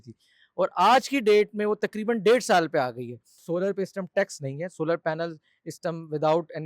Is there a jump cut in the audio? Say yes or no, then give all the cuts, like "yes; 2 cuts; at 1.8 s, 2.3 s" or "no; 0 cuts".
yes; 1 cut; at 3.4 s